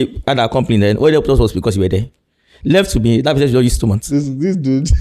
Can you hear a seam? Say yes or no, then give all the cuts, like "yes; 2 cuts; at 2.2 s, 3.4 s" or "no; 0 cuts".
no; 0 cuts